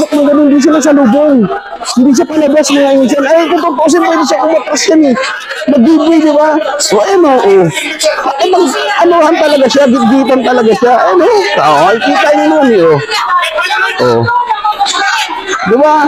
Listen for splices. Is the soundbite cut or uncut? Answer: uncut